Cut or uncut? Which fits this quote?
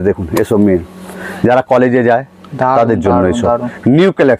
uncut